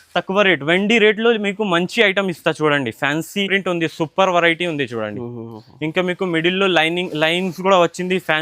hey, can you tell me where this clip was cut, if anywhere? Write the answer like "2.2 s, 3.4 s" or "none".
3.5 s

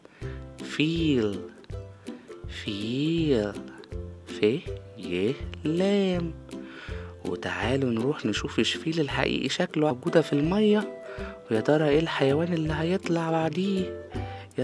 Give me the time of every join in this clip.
9.9 s

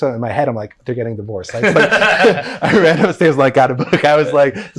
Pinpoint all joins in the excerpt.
none

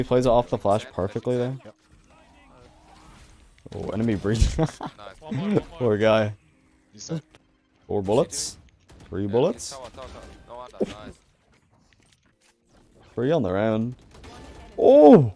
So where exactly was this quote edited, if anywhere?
7.3 s, 12.4 s

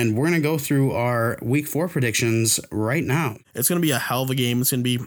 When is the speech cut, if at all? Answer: 3.5 s

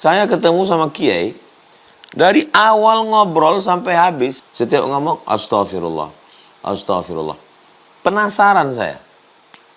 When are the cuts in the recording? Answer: 4.4 s

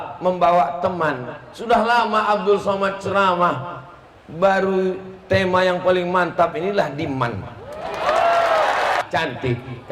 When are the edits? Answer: 9.0 s

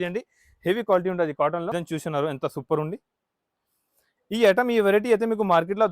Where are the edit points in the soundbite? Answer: 1.7 s

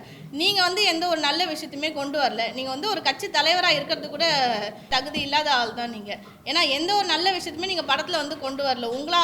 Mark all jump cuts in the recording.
4.9 s

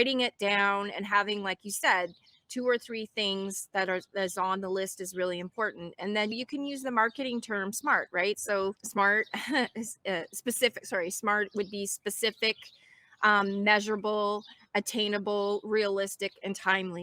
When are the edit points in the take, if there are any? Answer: none

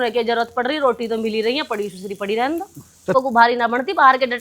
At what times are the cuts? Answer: 3.1 s

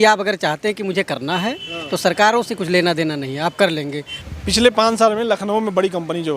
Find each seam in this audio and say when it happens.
4.1 s

